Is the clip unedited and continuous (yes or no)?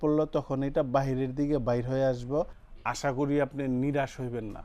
no